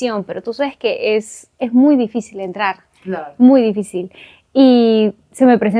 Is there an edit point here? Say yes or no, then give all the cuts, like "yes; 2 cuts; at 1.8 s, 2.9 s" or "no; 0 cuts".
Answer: no; 0 cuts